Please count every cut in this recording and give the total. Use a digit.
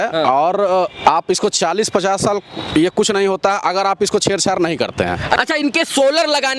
1